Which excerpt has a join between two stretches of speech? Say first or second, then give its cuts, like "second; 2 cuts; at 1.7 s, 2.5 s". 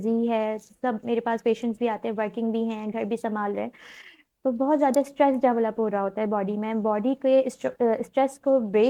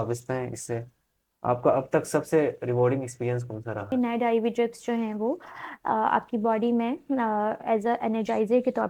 second; 1 cut; at 3.9 s